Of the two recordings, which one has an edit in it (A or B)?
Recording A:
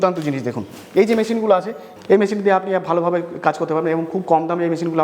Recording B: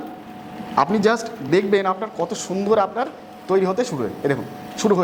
A